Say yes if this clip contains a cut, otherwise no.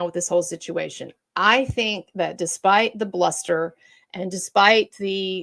no